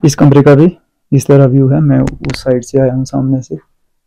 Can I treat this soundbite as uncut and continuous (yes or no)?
yes